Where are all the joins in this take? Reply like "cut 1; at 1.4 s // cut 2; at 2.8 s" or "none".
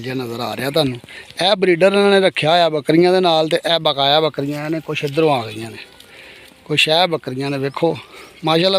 none